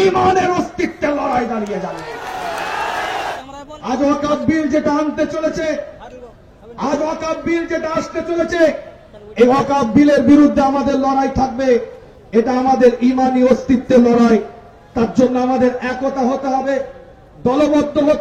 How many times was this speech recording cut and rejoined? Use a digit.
1